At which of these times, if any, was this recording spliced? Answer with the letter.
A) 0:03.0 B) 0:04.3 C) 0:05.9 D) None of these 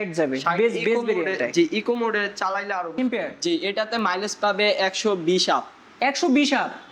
A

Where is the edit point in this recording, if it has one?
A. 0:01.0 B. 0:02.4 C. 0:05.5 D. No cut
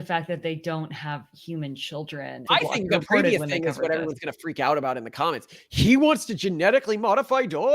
B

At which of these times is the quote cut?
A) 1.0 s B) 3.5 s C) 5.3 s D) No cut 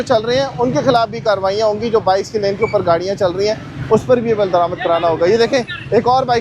D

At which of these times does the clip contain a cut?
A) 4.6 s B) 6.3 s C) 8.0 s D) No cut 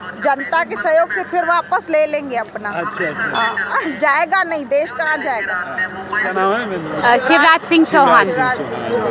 B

